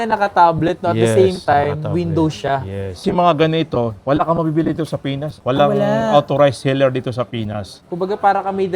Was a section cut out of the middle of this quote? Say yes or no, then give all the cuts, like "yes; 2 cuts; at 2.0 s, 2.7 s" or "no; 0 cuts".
yes; 1 cut; at 7.8 s